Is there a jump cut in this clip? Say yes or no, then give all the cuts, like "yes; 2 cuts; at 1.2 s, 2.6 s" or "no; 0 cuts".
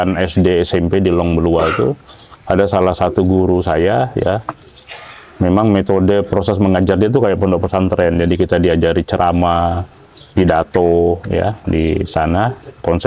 no; 0 cuts